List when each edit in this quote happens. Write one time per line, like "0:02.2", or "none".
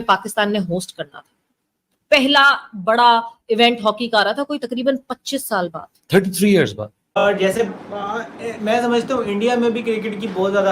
0:07.2

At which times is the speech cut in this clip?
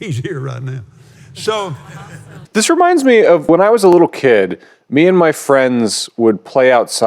0:02.4
0:03.5

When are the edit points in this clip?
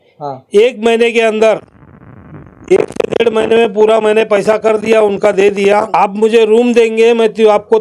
0:05.9

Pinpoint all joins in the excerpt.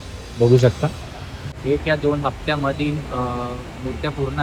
0:01.6

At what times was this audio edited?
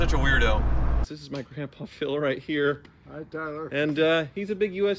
0:01.0

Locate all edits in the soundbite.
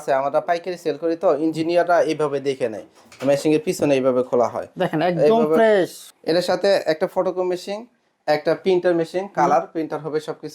0:06.0

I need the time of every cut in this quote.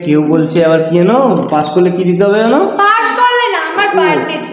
none

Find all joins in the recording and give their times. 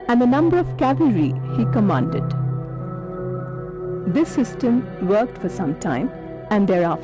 none

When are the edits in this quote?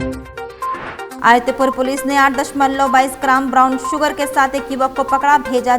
0:01.1

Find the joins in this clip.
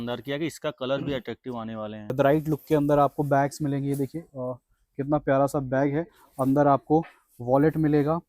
0:02.1

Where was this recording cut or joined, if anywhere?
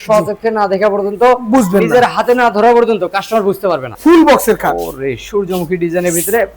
0:04.0

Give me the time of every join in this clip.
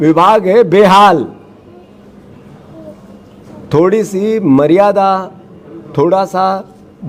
none

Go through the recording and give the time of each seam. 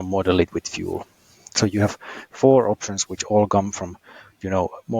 none

